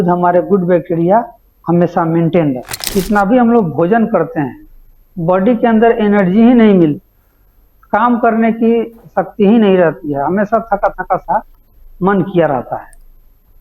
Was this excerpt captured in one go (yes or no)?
no